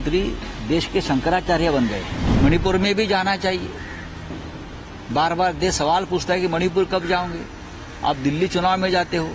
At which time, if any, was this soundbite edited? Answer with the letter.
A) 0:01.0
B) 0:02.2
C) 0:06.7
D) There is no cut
B